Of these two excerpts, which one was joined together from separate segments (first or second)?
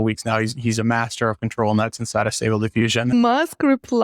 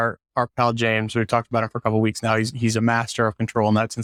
first